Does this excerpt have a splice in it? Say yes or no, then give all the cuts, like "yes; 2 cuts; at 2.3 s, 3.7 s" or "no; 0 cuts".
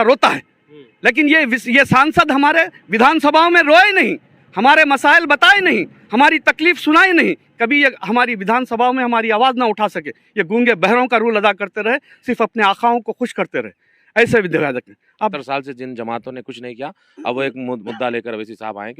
yes; 1 cut; at 15.0 s